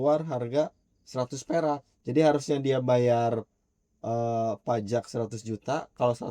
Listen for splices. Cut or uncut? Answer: cut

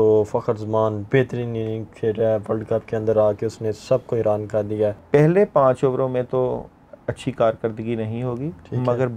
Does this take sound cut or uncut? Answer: cut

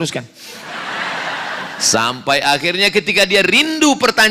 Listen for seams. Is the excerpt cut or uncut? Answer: cut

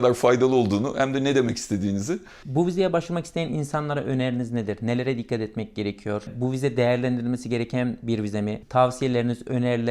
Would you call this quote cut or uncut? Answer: cut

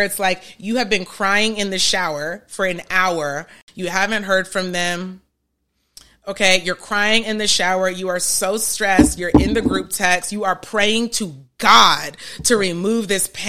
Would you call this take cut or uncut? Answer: cut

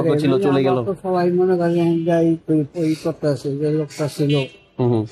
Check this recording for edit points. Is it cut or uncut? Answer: uncut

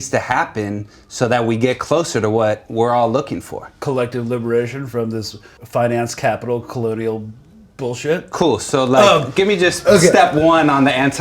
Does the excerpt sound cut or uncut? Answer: cut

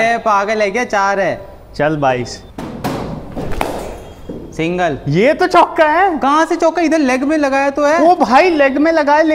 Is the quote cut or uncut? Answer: uncut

